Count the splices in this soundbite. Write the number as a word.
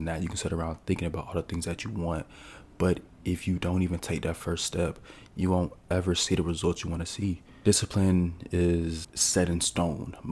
two